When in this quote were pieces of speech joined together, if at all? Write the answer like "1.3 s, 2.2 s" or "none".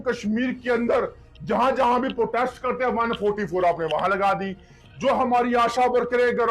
none